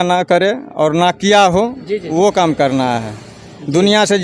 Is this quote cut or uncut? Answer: uncut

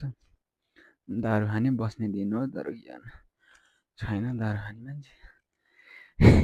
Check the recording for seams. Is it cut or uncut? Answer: uncut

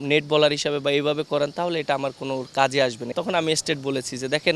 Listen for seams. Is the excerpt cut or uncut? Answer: cut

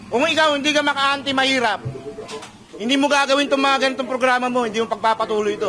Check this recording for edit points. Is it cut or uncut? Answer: uncut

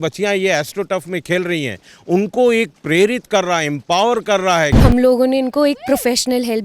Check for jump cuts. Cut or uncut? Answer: cut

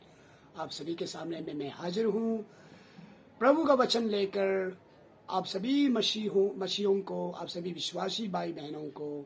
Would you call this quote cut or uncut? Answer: uncut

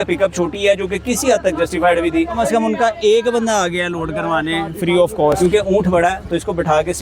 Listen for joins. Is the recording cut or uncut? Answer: cut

